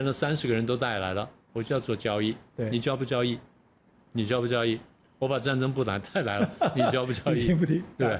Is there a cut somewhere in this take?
no; 0 cuts

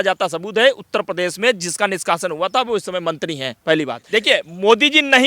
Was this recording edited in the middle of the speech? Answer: yes; 1 cut; at 4.0 s

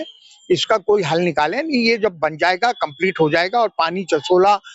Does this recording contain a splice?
no; 0 cuts

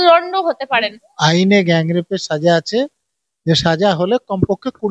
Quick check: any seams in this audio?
yes; 1 cut; at 1.0 s

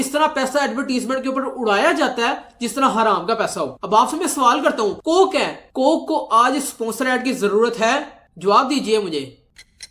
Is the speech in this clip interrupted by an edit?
no; 0 cuts

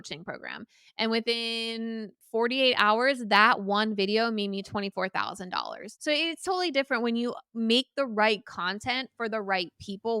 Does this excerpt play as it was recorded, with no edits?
no; 1 cut; at 5.9 s

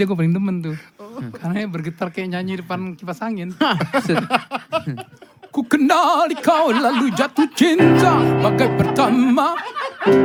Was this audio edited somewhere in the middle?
no; 0 cuts

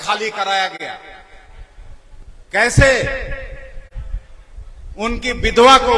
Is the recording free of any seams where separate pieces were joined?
yes; 0 cuts

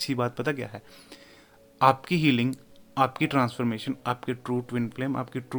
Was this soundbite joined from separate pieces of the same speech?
no; 0 cuts

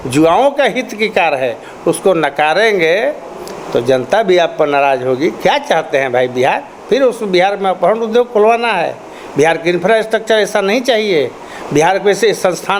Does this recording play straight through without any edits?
yes; 0 cuts

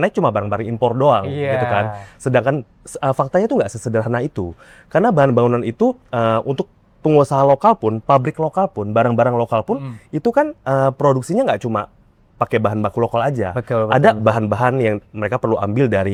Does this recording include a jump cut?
no; 0 cuts

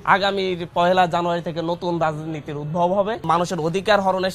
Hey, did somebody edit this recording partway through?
yes; 1 cut; at 3.2 s

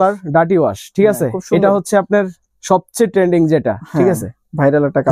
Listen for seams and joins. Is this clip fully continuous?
yes; 0 cuts

